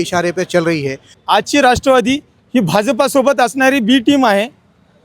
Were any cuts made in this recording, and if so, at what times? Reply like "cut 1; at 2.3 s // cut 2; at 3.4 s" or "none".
cut 1; at 1.2 s